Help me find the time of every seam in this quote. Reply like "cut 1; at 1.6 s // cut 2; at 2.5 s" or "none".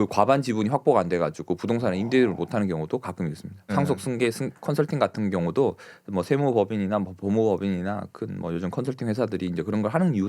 cut 1; at 3.7 s